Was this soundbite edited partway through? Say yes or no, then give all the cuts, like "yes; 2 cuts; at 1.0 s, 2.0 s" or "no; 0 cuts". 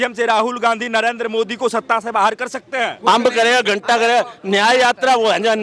no; 0 cuts